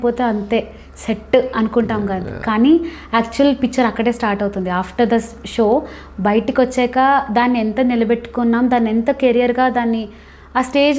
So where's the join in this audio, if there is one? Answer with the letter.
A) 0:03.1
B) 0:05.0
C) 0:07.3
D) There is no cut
D